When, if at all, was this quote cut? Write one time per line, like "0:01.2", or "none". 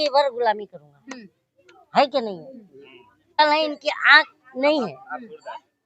0:03.4